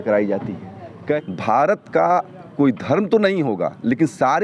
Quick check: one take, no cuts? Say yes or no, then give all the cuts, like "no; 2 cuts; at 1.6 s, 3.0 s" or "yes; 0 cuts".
no; 1 cut; at 1.0 s